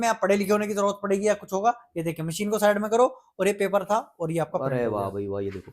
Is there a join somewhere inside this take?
no; 0 cuts

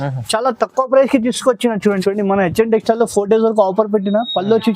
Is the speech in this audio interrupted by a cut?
yes; 1 cut; at 1.8 s

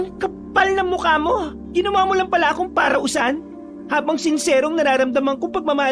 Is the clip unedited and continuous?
no; 1 cut; at 1.6 s

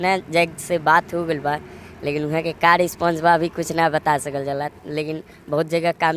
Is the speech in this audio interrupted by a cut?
no; 0 cuts

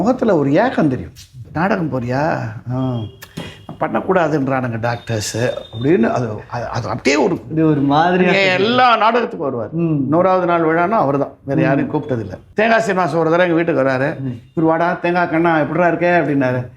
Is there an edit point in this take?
yes; 2 cuts; at 1.4 s, 12.4 s

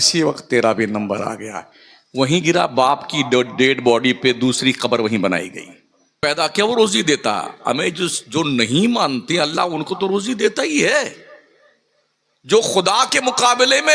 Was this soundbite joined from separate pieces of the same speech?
yes; 1 cut; at 6.2 s

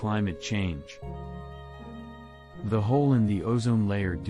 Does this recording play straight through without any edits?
no; 2 cuts; at 0.8 s, 2.7 s

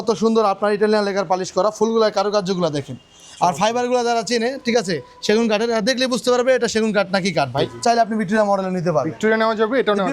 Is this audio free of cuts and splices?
no; 1 cut; at 7.7 s

